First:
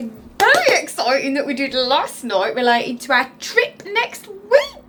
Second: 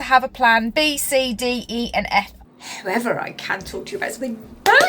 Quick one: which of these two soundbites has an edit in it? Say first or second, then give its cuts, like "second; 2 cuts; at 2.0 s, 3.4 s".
second; 1 cut; at 2.4 s